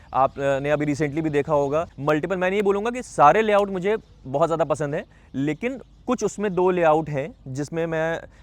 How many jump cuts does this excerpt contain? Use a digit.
1